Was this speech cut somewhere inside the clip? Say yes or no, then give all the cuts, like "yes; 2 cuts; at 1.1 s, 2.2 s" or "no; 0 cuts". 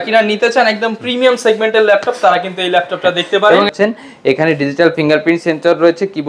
yes; 1 cut; at 3.7 s